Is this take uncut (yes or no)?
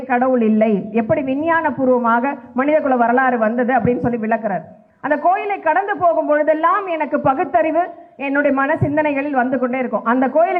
yes